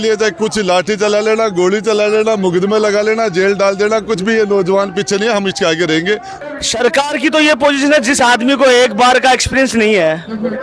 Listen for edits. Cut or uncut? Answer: cut